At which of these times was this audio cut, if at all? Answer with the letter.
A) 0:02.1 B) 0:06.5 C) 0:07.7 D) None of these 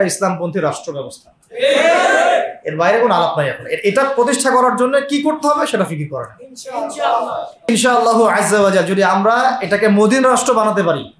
C